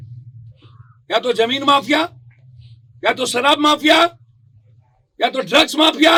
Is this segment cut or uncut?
uncut